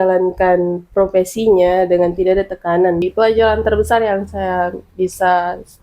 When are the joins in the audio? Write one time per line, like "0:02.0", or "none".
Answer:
0:03.1